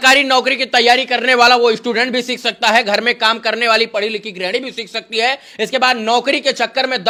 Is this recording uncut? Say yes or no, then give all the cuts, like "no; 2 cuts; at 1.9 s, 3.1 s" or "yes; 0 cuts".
yes; 0 cuts